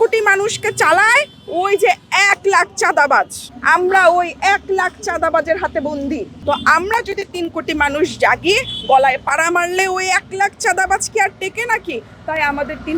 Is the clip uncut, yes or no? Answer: yes